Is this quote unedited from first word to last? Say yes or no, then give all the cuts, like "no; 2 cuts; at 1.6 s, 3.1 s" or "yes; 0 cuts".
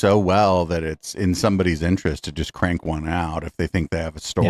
yes; 0 cuts